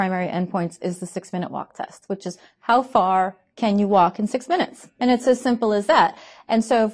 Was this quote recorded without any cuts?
yes; 0 cuts

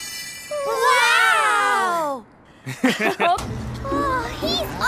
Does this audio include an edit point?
yes; 1 cut; at 3.4 s

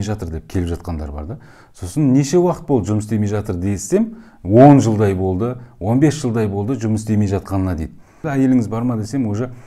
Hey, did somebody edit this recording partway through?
yes; 1 cut; at 8.2 s

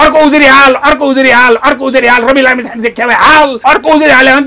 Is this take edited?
yes; 1 cut; at 3.6 s

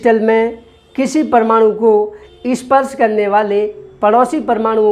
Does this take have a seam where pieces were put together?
no; 0 cuts

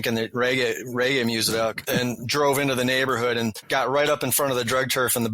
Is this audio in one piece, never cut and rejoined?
no; 2 cuts; at 1.8 s, 3.6 s

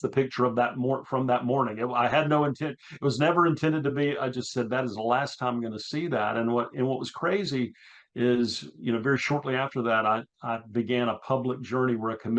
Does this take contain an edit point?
no; 0 cuts

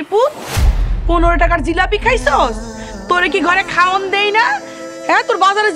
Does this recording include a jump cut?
no; 0 cuts

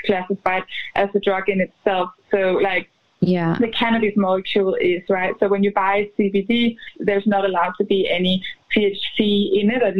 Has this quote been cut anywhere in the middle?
yes; 1 cut; at 6.9 s

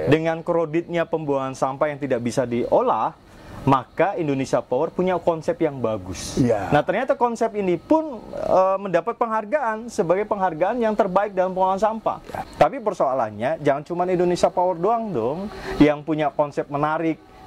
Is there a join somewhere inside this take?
yes; 1 cut; at 12.4 s

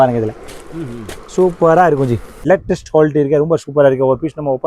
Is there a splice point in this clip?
yes; 1 cut; at 2.3 s

